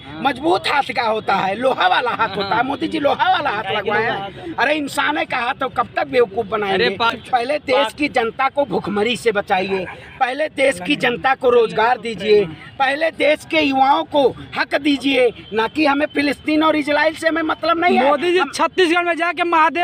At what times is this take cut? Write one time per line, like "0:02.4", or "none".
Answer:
none